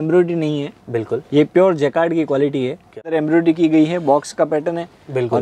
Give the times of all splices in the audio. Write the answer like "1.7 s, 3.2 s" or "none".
3.1 s